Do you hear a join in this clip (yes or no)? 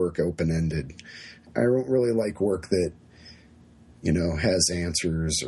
yes